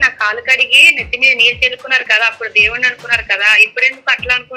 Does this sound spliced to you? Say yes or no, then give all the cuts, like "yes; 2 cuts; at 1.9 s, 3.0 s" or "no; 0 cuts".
no; 0 cuts